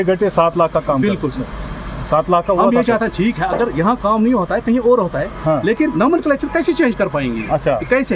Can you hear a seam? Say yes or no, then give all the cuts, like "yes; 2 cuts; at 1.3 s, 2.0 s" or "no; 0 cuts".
no; 0 cuts